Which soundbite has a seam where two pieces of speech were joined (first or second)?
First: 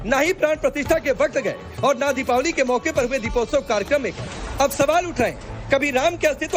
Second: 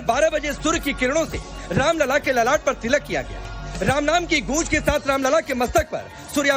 first